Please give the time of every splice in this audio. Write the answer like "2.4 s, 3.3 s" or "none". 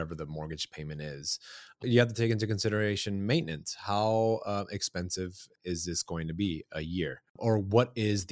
1.8 s, 5.5 s, 7.2 s